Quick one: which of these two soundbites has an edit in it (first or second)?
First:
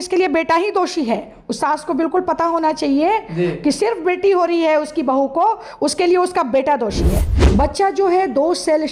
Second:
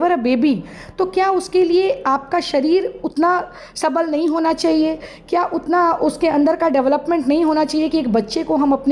first